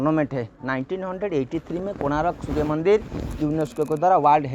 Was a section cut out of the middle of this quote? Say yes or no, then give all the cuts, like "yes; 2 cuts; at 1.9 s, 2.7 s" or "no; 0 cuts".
no; 0 cuts